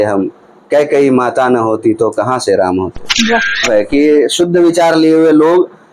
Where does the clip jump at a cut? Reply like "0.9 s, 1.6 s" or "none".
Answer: 3.7 s

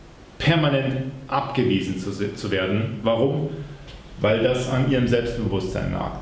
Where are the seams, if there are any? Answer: none

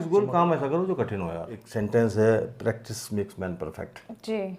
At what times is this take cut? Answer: 1.6 s

